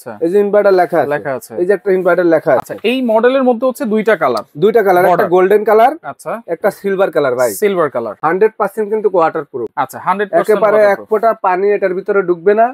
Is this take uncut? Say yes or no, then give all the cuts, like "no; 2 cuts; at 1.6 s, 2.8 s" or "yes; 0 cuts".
yes; 0 cuts